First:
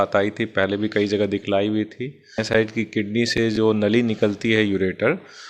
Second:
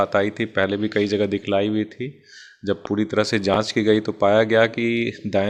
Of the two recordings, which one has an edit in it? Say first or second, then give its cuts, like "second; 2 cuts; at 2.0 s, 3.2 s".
first; 1 cut; at 2.4 s